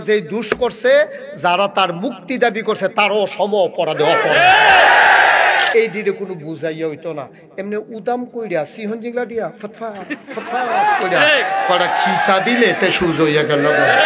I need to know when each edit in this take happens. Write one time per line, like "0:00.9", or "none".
0:05.7